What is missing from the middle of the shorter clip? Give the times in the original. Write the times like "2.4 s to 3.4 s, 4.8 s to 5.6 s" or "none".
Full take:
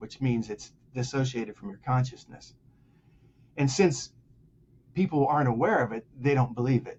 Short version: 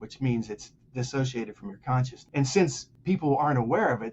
2.2 s to 3.4 s, 4.1 s to 4.8 s